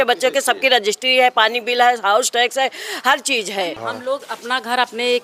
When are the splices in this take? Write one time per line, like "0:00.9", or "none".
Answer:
0:03.9